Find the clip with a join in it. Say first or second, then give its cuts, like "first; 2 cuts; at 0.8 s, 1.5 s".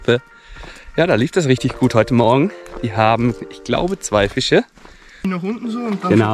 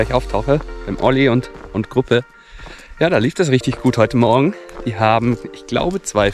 first; 1 cut; at 5.2 s